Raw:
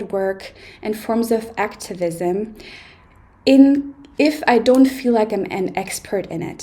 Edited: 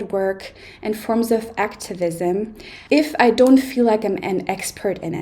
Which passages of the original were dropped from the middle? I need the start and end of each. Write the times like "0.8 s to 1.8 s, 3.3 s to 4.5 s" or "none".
2.7 s to 4.0 s